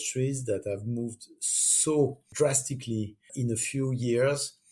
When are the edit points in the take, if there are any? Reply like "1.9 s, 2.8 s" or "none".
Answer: 2.3 s, 3.3 s